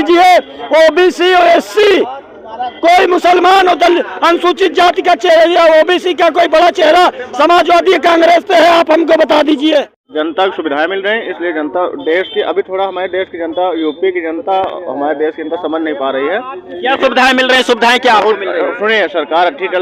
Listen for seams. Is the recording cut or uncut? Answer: cut